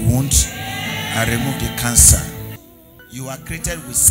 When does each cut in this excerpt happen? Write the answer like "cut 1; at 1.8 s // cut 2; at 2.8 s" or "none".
cut 1; at 2.5 s